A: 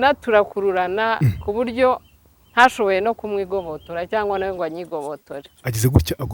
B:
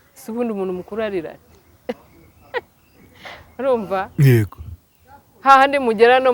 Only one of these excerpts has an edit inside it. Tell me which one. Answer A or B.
A